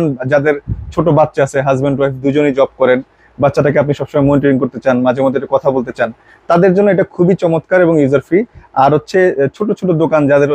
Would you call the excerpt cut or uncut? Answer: uncut